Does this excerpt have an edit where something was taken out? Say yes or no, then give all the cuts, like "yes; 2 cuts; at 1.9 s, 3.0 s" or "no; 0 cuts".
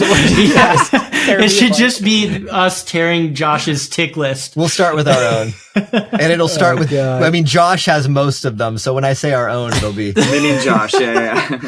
no; 0 cuts